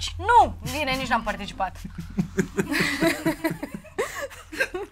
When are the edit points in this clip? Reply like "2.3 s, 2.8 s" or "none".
none